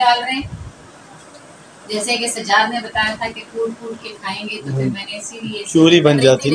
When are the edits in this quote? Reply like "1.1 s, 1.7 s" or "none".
none